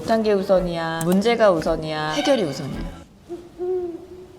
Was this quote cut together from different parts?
yes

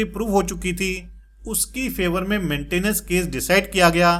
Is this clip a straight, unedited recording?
yes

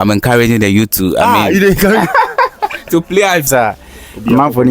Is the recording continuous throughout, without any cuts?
no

